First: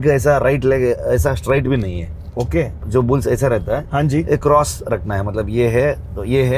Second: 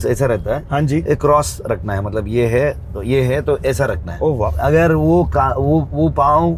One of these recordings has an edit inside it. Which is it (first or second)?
second